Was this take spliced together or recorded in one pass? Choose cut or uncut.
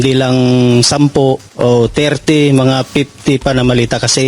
cut